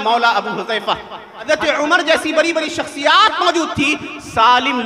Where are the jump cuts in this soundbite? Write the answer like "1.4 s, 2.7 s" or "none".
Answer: 1.5 s